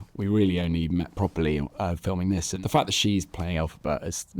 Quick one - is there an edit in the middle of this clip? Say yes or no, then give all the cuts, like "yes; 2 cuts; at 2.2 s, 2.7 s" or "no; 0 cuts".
yes; 1 cut; at 2.5 s